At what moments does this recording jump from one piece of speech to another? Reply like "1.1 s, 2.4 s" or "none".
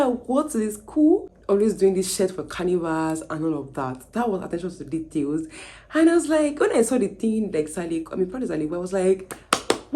1.3 s